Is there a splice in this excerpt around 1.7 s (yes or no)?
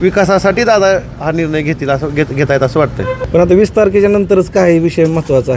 no